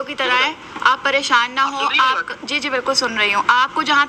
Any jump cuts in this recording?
no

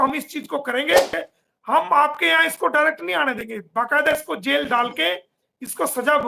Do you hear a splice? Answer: yes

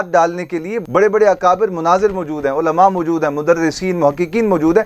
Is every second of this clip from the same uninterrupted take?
yes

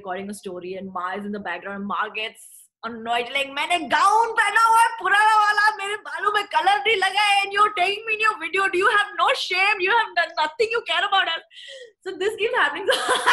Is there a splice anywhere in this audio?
no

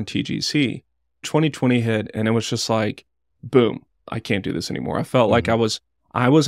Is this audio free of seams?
no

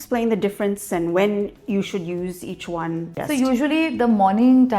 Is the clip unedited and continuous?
no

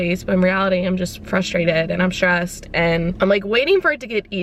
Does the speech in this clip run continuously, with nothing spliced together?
yes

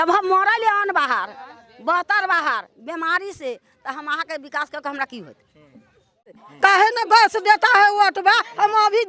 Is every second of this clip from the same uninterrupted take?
no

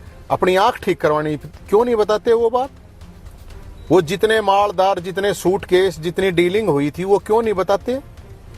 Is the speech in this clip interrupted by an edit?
no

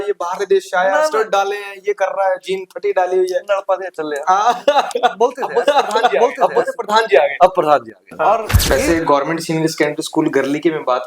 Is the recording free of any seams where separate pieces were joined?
no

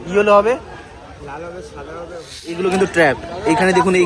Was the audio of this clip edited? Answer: yes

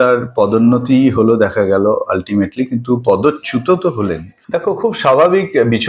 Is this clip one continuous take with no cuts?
no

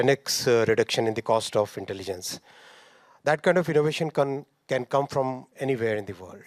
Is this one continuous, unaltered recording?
yes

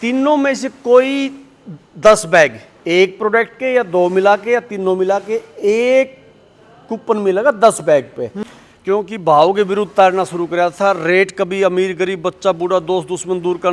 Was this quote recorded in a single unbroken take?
no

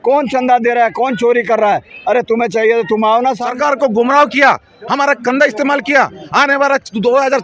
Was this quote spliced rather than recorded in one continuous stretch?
yes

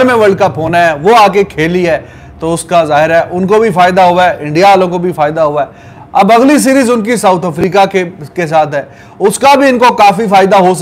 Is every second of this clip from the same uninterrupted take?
yes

